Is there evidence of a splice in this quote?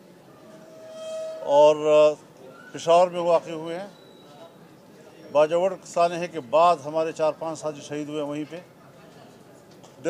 yes; 1 cut; at 2.3 s

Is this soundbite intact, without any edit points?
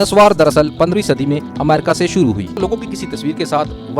no; 1 cut; at 2.6 s

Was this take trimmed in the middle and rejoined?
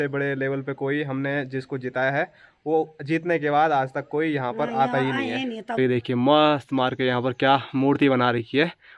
yes; 1 cut; at 5.7 s

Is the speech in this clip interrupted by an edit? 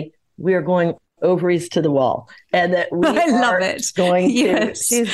no; 0 cuts

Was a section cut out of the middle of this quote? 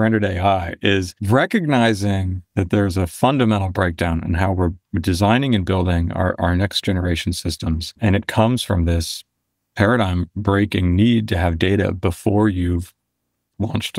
yes; 1 cut; at 1.1 s

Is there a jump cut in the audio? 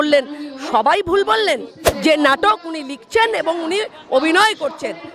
yes; 1 cut; at 1.8 s

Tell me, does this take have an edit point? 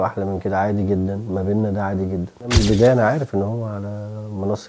yes; 1 cut; at 2.5 s

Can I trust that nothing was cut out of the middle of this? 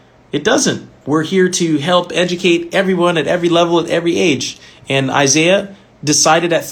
no; 1 cut; at 0.9 s

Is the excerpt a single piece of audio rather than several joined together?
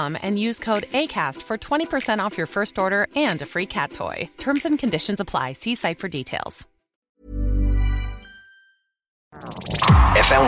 no; 2 cuts; at 7.0 s, 9.3 s

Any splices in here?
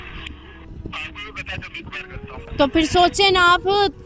yes; 1 cut; at 2.5 s

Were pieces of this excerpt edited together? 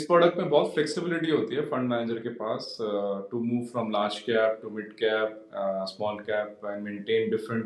no; 0 cuts

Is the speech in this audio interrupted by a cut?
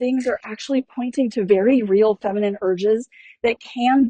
no; 0 cuts

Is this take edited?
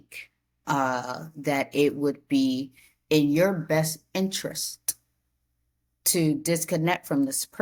no; 0 cuts

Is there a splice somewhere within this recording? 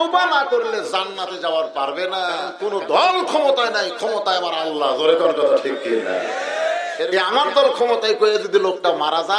yes; 2 cuts; at 2.5 s, 7.0 s

